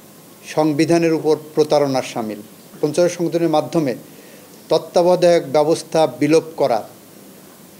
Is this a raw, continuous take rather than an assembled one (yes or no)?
no